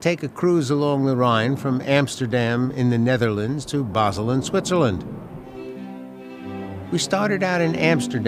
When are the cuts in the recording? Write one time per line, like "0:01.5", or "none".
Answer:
0:01.4